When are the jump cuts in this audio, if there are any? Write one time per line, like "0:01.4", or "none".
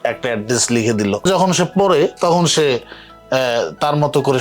0:01.2

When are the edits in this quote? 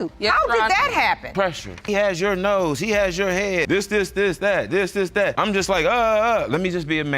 0:01.8
0:03.6
0:05.4

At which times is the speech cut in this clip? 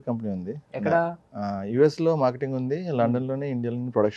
none

